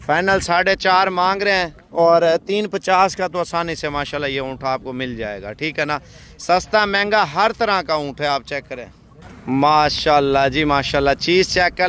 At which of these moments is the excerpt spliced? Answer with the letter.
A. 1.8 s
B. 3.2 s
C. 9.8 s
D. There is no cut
D